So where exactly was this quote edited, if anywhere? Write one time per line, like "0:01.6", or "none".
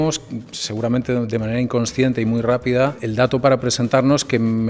none